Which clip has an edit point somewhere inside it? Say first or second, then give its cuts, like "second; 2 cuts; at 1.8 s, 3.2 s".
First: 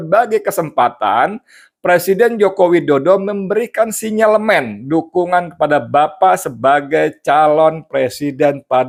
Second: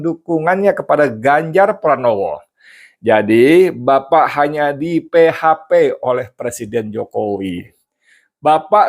second; 1 cut; at 7.8 s